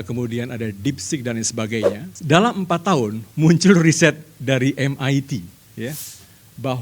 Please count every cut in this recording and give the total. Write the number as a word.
one